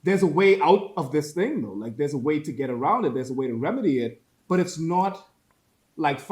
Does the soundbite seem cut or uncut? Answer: uncut